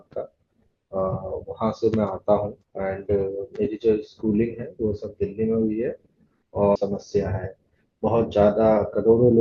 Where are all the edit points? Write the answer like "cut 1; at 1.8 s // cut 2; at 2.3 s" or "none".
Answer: cut 1; at 6.8 s